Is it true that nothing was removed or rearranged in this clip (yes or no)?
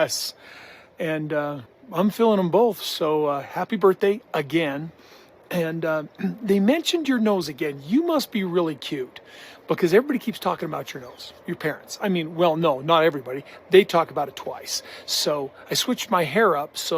no